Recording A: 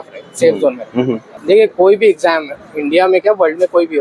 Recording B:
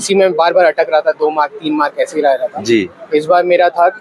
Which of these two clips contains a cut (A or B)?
A